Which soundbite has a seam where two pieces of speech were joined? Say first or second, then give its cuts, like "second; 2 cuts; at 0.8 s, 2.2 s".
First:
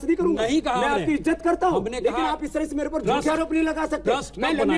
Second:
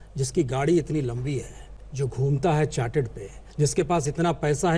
second; 1 cut; at 3.4 s